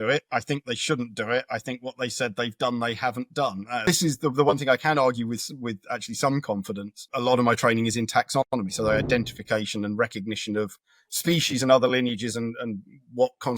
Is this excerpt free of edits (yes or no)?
no